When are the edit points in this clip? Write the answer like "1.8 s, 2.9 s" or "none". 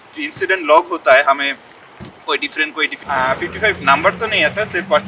2.9 s